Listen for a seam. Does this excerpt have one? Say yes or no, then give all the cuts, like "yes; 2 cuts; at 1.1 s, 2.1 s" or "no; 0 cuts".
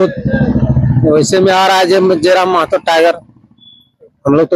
no; 0 cuts